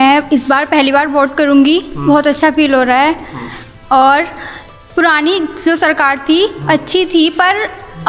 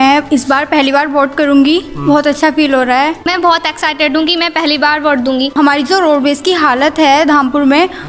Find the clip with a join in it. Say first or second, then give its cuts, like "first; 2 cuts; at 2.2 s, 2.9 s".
second; 2 cuts; at 3.3 s, 5.5 s